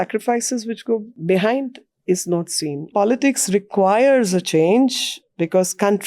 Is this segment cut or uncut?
cut